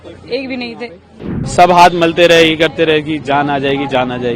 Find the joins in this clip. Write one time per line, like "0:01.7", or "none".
0:01.3